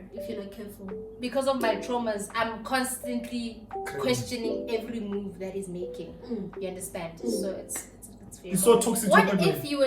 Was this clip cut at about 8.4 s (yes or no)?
yes